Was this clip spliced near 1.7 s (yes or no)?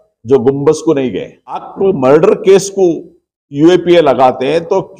yes